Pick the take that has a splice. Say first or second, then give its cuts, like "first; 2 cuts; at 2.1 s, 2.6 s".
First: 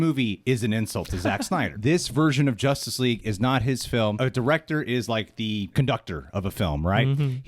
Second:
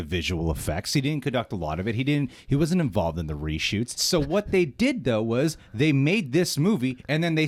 first; 2 cuts; at 1.7 s, 5.7 s